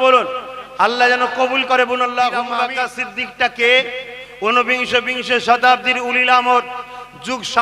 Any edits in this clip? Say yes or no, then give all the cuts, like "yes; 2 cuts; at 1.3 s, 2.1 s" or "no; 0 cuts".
yes; 1 cut; at 2.5 s